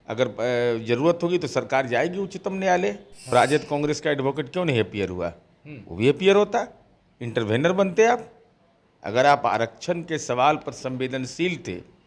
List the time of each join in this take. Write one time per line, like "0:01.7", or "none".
0:03.1